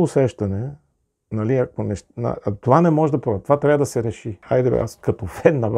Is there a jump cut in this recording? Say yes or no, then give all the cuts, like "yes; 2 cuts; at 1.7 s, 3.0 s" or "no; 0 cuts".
yes; 1 cut; at 4.4 s